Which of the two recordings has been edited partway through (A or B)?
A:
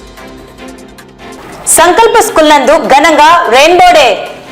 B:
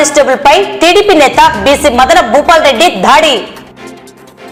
A